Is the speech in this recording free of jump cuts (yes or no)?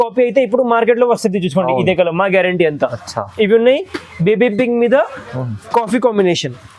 yes